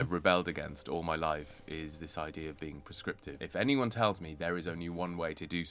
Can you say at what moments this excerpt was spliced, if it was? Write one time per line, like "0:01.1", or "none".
0:03.4